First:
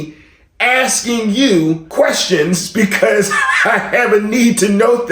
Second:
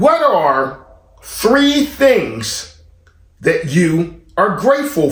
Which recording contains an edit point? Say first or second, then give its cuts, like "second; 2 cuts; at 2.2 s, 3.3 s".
first; 1 cut; at 1.9 s